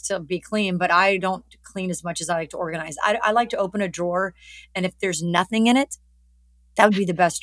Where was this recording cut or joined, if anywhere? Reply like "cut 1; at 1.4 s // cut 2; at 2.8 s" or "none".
none